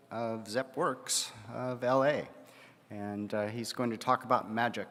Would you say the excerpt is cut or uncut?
uncut